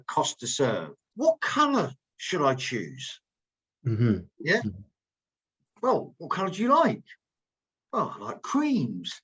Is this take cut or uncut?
cut